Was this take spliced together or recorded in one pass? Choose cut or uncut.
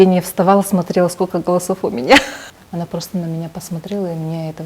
cut